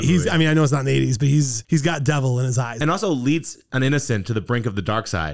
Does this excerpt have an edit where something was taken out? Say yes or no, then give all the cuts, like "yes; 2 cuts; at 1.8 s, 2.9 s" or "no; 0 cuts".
yes; 1 cut; at 2.7 s